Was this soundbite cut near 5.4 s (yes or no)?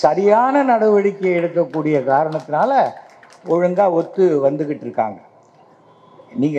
no